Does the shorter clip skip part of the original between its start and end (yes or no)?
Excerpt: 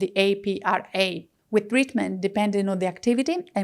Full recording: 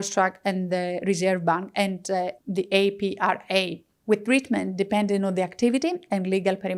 no